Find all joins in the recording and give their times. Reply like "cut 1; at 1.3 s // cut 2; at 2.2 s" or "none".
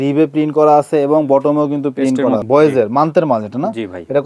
cut 1; at 2.4 s